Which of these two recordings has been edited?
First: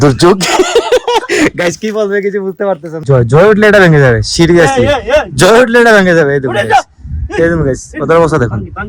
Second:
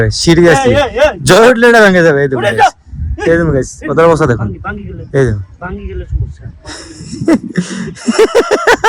first; 1 cut; at 3.0 s

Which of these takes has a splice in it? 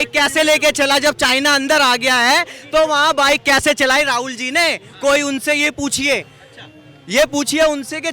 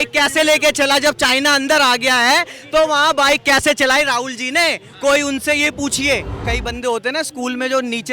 second; 1 cut; at 6.4 s

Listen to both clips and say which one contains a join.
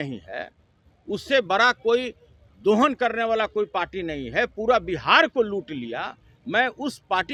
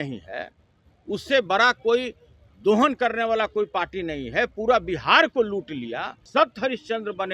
second; 1 cut; at 6.1 s

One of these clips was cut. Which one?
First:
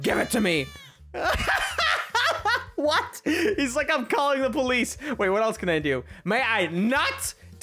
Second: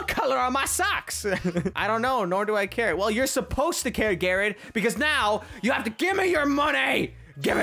second; 1 cut; at 1.8 s

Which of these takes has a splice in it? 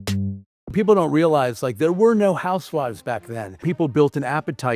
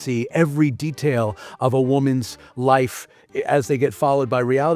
first; 2 cuts; at 0.7 s, 3.6 s

